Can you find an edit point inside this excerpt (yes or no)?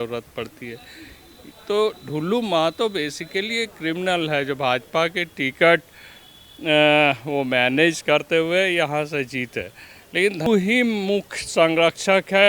yes